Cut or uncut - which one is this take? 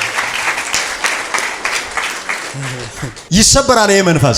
uncut